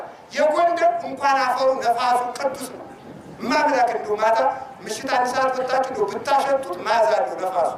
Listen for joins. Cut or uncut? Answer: uncut